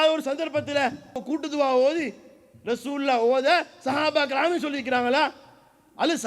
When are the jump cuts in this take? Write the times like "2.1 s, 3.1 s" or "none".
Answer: 1.2 s